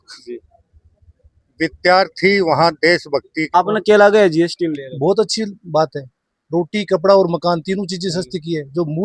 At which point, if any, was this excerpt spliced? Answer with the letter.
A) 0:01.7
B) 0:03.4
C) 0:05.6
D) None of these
B